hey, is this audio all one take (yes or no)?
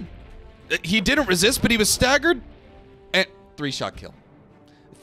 yes